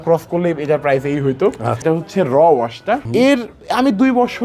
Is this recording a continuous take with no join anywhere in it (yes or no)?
no